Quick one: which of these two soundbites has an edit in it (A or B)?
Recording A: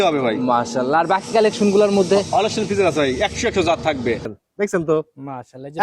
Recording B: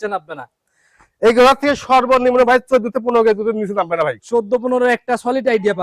A